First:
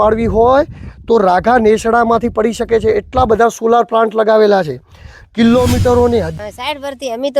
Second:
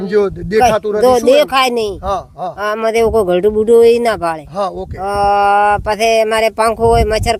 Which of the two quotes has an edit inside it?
first; 1 cut; at 6.4 s

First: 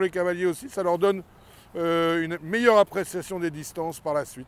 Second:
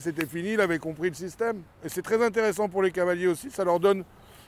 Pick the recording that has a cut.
second; 1 cut; at 1.9 s

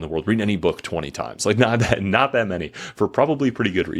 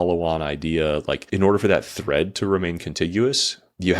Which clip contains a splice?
second; 1 cut; at 1.2 s

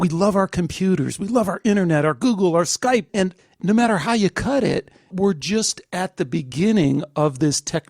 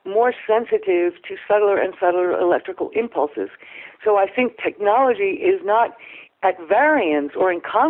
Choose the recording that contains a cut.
first; 2 cuts; at 3.3 s, 5.1 s

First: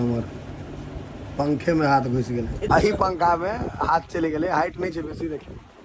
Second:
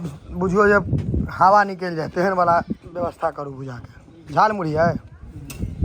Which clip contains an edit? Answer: first; 1 cut; at 2.7 s

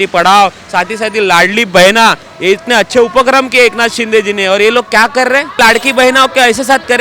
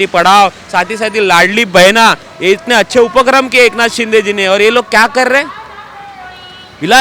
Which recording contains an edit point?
first; 1 cut; at 5.6 s

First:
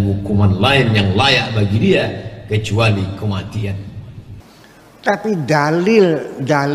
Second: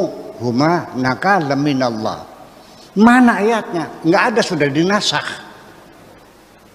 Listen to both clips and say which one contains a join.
first; 1 cut; at 4.4 s

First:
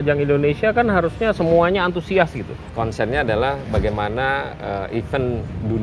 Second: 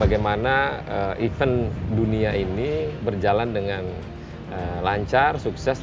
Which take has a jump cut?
first; 1 cut; at 2.6 s

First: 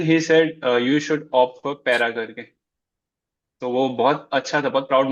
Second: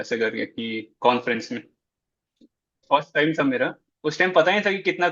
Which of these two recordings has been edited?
second; 1 cut; at 2.8 s

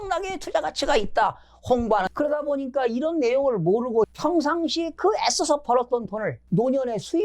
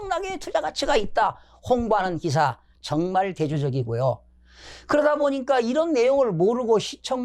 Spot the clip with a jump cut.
first; 3 cuts; at 2.1 s, 4.1 s, 6.5 s

